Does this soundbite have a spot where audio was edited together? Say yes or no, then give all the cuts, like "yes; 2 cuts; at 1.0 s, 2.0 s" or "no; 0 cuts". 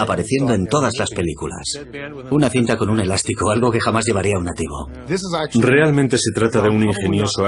no; 0 cuts